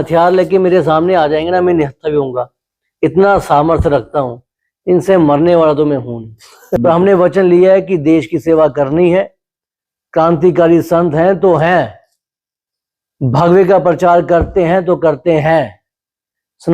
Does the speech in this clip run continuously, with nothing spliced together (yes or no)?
no